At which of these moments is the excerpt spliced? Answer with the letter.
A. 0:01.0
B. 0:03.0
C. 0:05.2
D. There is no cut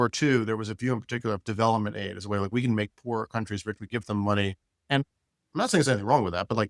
D